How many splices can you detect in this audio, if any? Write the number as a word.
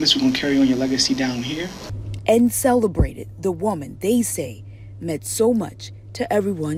zero